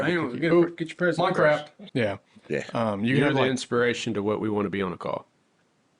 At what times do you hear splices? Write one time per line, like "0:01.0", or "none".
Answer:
0:01.8